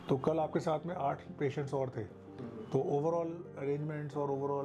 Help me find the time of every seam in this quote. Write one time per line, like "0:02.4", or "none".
none